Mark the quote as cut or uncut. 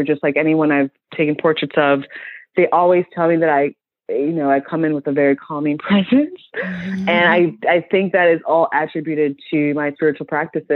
uncut